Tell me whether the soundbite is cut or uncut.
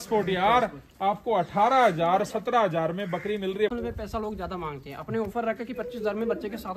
cut